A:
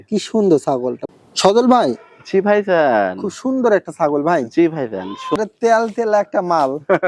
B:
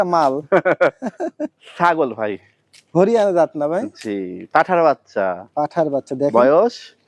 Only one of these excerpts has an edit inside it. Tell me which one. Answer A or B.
A